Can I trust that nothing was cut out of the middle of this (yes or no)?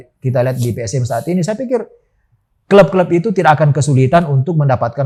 yes